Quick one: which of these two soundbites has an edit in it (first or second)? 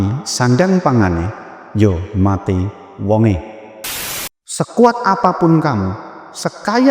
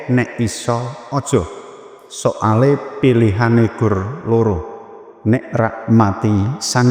first